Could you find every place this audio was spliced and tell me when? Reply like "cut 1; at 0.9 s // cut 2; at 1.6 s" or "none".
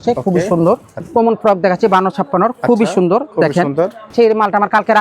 cut 1; at 1.0 s // cut 2; at 4.1 s